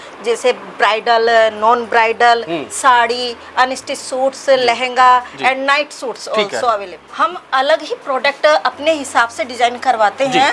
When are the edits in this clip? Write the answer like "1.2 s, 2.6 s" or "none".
7.0 s

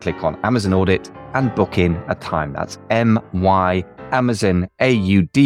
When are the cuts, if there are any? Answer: 3.9 s

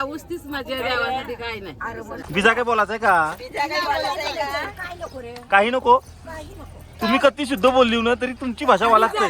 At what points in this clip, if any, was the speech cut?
2.2 s

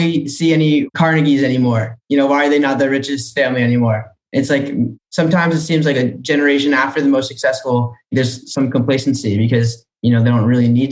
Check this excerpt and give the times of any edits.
0.9 s

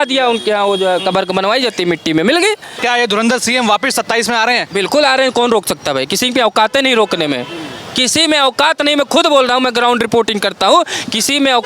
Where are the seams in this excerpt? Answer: 2.7 s

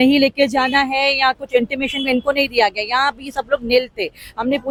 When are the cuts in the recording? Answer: none

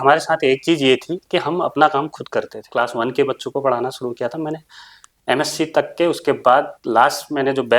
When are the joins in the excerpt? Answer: 2.6 s

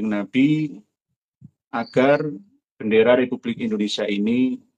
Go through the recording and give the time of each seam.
none

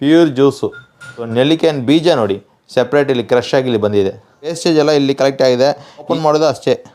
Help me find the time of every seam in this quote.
4.6 s, 6.1 s

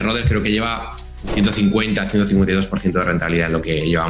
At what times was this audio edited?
none

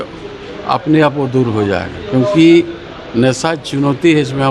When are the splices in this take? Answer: none

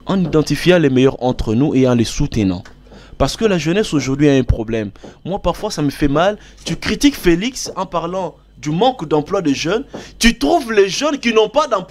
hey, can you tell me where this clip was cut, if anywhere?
none

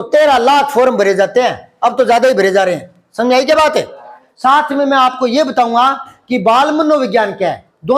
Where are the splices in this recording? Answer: 4.2 s

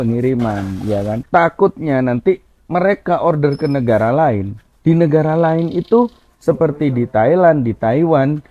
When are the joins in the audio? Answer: 1.2 s

